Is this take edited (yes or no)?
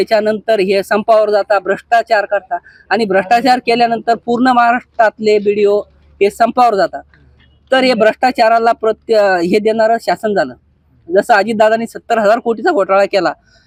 no